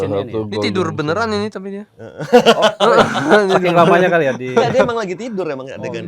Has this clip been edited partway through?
no; 0 cuts

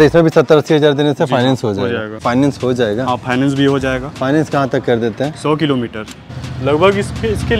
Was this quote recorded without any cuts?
no; 2 cuts; at 2.2 s, 6.2 s

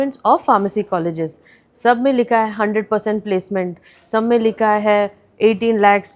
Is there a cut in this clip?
no; 0 cuts

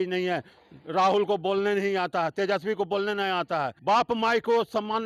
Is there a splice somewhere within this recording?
no; 0 cuts

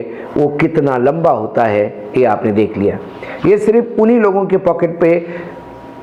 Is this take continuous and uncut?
yes; 0 cuts

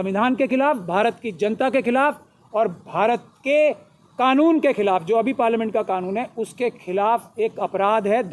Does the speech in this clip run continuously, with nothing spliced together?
yes; 0 cuts

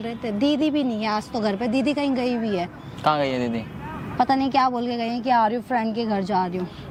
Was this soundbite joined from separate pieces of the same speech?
no; 0 cuts

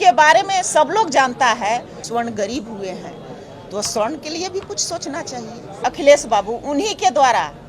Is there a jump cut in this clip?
yes; 2 cuts; at 2.0 s, 5.7 s

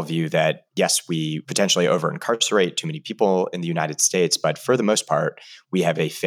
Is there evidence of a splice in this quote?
yes; 1 cut; at 1.4 s

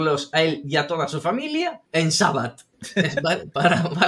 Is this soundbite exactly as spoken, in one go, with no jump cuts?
yes; 0 cuts

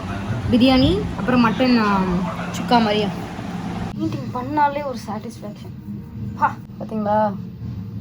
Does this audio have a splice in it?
yes; 2 cuts; at 3.9 s, 6.7 s

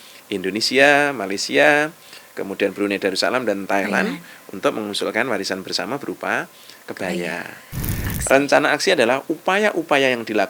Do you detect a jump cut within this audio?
yes; 1 cut; at 8.1 s

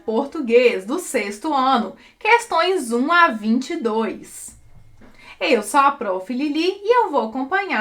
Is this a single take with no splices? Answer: yes; 0 cuts

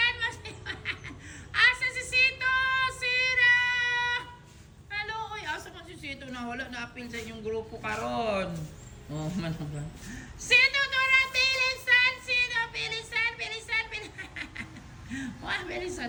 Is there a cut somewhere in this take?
no; 0 cuts

